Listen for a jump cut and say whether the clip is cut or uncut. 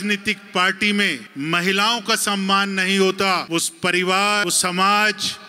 cut